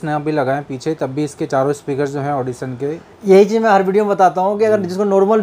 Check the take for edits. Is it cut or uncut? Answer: uncut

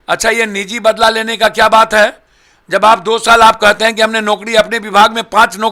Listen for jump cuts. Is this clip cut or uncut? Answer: uncut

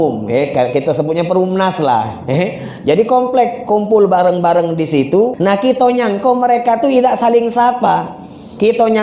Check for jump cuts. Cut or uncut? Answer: cut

